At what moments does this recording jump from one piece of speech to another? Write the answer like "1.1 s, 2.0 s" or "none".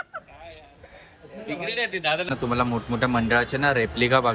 2.3 s